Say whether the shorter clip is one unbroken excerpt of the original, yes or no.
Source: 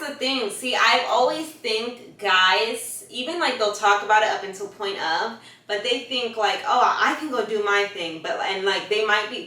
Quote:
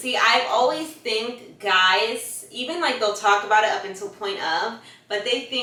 yes